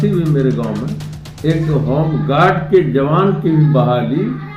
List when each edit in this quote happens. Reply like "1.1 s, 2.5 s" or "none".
none